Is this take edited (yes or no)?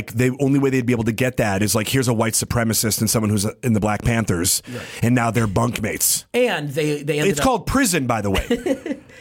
no